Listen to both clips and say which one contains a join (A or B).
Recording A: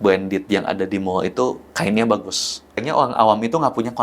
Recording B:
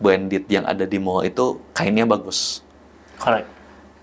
A